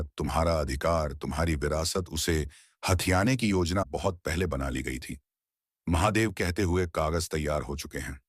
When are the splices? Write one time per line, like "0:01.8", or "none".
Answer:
0:03.8